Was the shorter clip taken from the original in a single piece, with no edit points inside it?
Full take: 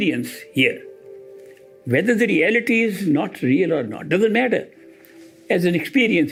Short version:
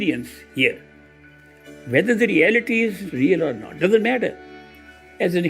no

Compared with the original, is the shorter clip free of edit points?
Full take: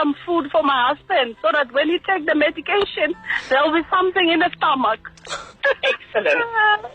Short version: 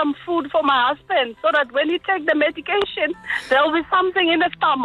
yes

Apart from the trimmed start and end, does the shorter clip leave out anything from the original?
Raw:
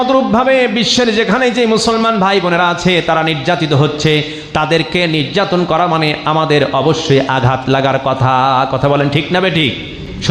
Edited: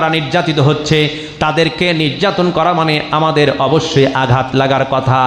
no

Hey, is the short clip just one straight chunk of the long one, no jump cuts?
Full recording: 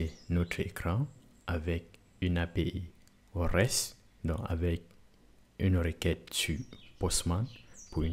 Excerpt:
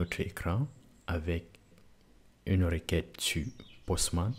no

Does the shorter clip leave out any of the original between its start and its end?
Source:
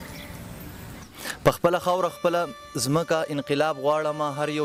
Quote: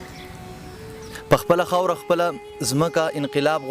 yes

